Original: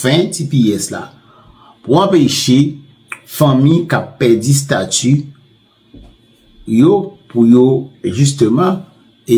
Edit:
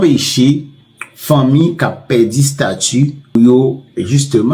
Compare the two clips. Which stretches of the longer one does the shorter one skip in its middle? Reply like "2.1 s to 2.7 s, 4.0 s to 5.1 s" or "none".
5.5 s to 7.4 s